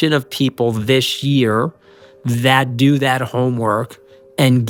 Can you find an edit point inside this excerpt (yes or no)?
no